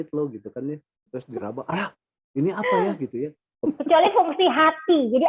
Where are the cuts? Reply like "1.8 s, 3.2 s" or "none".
0.9 s, 3.6 s

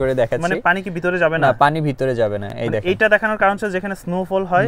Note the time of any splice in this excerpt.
none

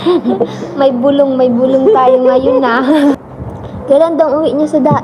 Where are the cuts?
3.1 s

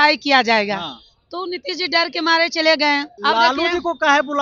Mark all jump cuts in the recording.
3.1 s

